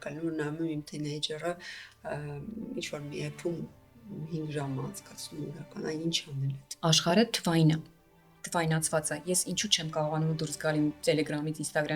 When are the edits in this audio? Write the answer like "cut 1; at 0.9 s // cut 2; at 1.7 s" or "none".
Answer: cut 1; at 6.6 s